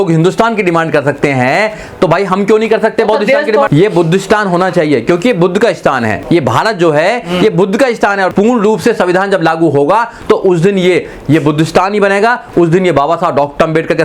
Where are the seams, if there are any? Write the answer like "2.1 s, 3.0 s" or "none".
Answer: 3.7 s, 6.2 s, 8.3 s